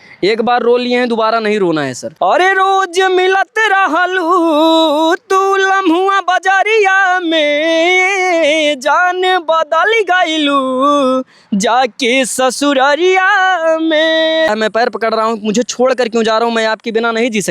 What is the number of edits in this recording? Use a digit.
2